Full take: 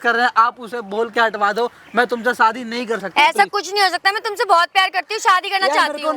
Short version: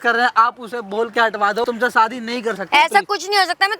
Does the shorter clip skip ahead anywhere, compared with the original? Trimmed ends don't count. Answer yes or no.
yes